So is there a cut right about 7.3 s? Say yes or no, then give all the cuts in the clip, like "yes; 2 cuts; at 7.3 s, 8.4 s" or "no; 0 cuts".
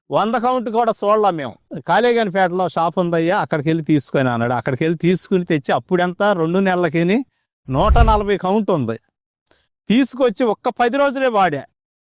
no; 1 cut; at 1.5 s